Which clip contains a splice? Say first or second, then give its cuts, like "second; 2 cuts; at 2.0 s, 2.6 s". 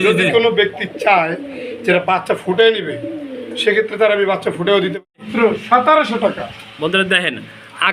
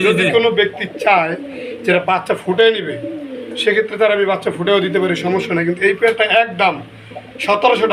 first; 1 cut; at 5.2 s